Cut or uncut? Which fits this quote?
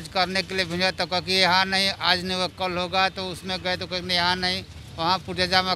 uncut